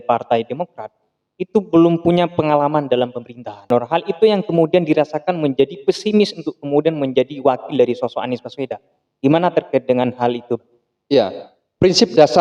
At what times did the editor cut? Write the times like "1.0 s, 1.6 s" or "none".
3.7 s